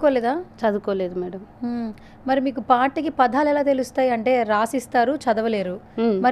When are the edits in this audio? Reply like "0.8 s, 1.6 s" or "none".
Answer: none

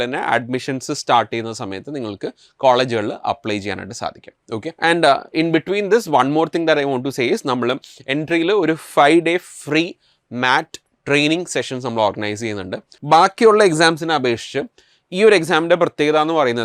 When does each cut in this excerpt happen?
4.8 s, 12.9 s

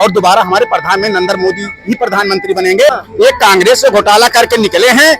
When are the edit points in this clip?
2.9 s

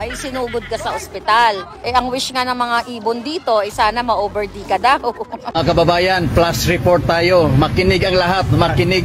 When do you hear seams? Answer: 1.8 s, 5.4 s

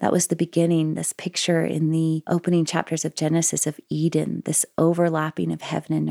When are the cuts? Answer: 2.2 s

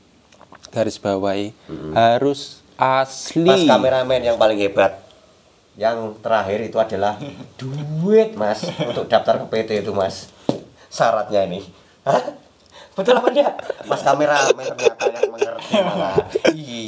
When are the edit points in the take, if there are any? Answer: 3.7 s

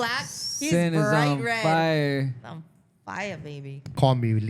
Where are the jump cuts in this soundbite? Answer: none

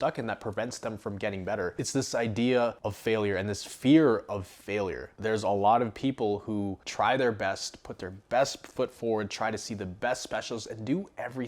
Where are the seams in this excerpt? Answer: 1.7 s, 5.1 s

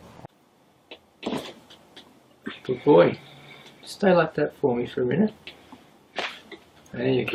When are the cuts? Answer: none

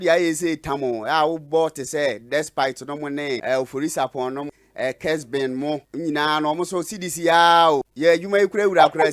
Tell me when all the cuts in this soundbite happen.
3.4 s, 4.4 s, 5.9 s, 7.9 s

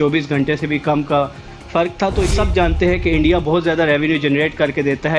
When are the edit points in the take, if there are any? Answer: 2.3 s

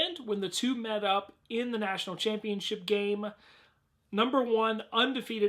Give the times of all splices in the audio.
none

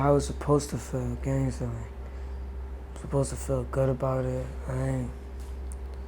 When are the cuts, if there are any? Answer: none

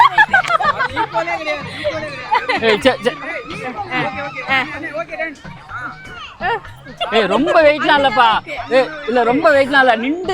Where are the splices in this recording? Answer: none

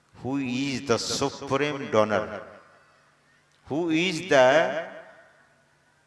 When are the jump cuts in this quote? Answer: none

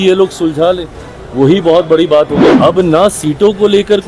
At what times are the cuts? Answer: 2.5 s

